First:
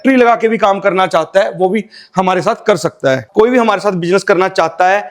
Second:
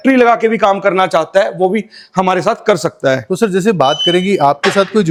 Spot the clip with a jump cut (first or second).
first